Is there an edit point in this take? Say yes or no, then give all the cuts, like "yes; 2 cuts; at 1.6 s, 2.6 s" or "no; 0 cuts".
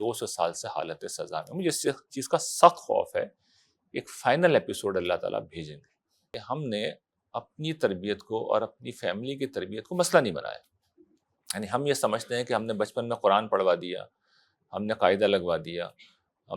yes; 1 cut; at 6.4 s